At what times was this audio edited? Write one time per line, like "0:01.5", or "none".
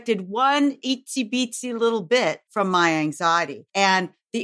0:02.4
0:03.6